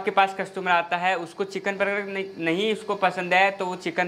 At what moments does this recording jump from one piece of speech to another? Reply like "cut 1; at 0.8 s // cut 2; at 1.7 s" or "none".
none